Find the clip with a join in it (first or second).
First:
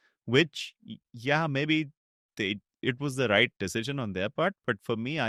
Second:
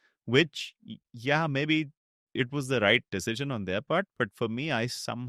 second